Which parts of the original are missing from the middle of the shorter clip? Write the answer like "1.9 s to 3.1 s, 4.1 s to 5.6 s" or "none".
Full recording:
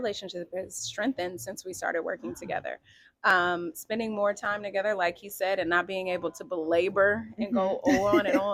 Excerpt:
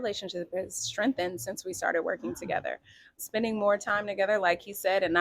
3.2 s to 3.7 s